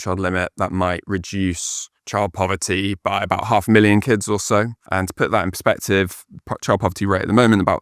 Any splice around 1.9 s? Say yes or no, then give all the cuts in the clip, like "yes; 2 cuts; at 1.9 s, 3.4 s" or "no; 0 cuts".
no; 1 cut; at 4.8 s